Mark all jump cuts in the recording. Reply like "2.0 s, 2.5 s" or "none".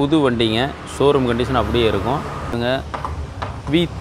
2.5 s